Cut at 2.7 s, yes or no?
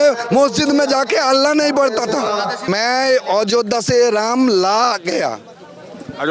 yes